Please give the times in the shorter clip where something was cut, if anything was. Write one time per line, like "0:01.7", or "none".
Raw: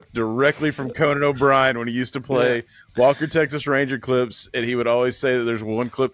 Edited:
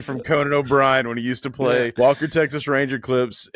0:01.9